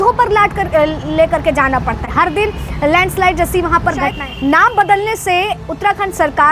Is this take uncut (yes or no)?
no